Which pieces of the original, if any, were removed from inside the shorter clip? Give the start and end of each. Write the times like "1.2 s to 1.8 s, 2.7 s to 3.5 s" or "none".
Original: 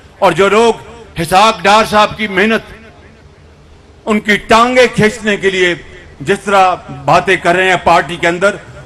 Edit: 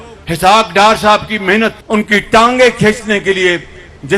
2.7 s to 4.0 s